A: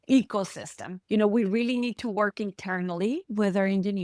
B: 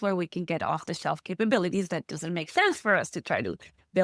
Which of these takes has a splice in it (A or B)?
A